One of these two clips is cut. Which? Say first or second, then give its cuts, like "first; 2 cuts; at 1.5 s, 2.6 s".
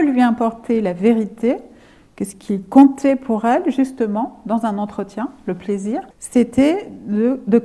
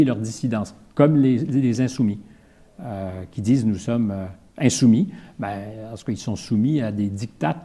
first; 1 cut; at 6.2 s